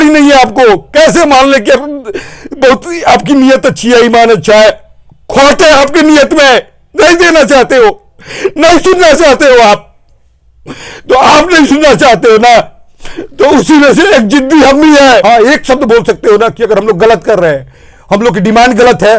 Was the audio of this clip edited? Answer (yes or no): yes